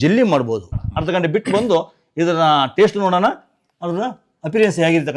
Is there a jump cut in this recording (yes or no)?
yes